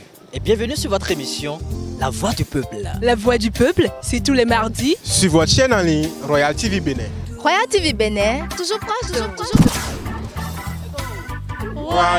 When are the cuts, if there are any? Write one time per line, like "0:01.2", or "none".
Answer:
none

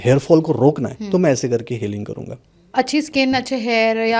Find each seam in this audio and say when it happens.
0:02.7

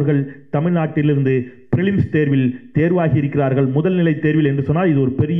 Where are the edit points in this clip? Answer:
none

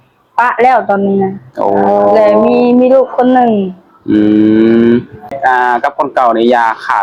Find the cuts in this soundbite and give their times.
0:05.3

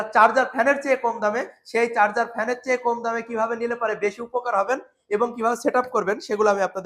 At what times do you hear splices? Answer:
none

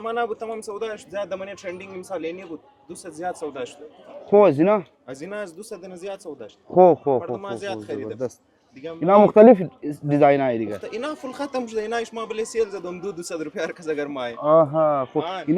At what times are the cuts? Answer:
none

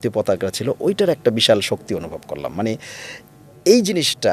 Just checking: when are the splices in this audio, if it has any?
none

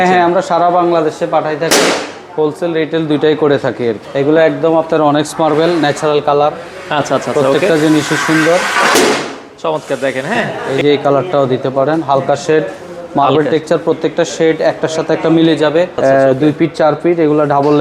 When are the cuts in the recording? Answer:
0:04.0
0:10.6
0:15.9

